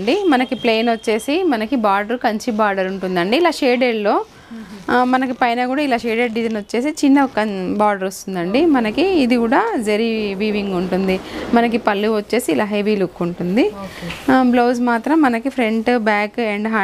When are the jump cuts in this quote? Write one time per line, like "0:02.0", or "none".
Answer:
none